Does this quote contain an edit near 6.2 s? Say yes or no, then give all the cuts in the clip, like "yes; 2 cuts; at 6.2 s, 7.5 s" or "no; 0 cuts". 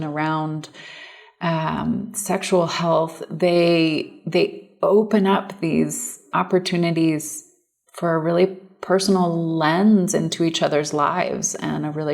yes; 1 cut; at 6.2 s